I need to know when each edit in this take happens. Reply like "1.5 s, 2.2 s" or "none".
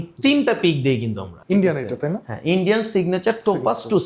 1.3 s